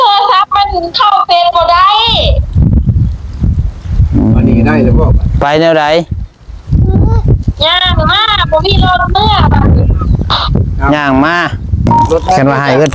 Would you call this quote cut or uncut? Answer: cut